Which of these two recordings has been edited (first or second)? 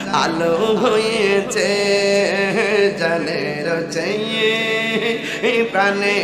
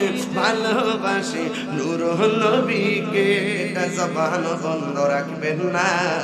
second